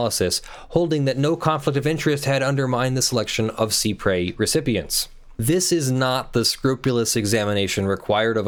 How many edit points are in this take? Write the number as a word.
zero